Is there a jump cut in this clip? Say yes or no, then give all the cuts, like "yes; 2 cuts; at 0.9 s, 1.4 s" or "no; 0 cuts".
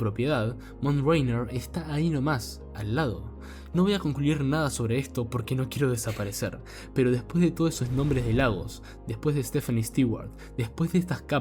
no; 0 cuts